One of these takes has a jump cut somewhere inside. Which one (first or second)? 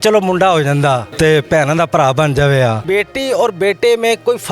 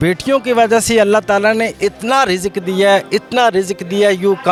first